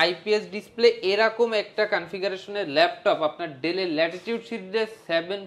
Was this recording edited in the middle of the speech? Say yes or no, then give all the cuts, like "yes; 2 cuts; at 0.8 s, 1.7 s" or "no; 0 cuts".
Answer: no; 0 cuts